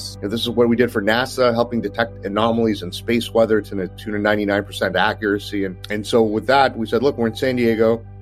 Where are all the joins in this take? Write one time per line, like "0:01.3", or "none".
none